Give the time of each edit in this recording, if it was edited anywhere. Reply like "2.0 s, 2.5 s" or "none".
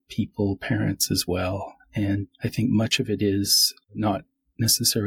2.3 s, 3.9 s